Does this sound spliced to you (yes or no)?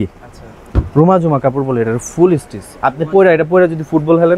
no